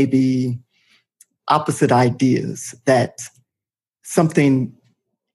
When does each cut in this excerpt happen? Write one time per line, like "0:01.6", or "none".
none